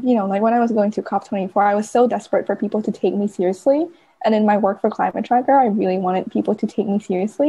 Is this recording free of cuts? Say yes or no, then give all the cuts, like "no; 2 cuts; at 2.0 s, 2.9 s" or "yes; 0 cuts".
yes; 0 cuts